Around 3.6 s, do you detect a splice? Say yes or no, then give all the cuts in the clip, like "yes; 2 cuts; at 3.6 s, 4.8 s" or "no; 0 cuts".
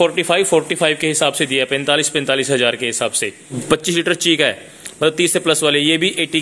yes; 1 cut; at 3.6 s